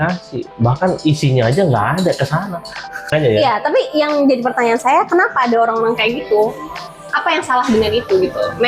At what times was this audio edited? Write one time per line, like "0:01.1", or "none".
0:03.1